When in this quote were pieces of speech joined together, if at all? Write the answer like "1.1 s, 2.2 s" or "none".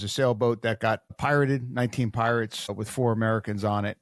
1.2 s, 2.7 s